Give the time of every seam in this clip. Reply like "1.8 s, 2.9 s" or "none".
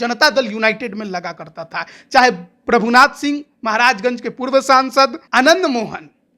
5.2 s

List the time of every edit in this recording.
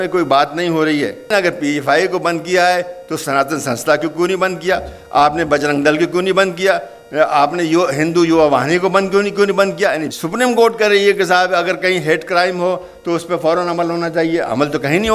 1.2 s, 10.1 s

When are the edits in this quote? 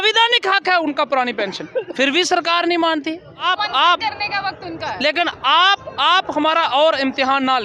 3.4 s

